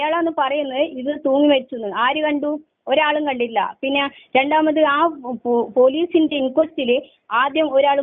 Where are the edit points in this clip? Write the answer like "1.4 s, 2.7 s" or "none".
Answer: none